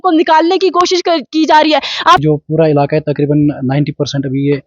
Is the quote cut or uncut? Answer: cut